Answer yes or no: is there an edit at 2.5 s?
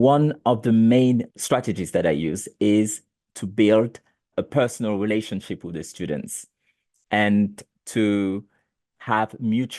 no